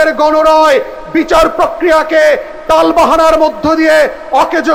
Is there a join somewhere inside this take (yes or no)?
no